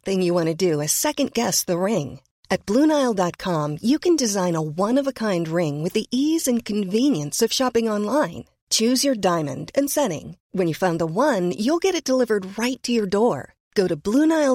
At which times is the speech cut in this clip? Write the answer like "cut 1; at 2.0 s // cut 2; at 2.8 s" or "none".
none